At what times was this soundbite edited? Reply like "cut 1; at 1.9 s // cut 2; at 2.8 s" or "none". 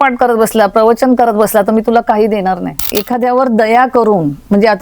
cut 1; at 2.9 s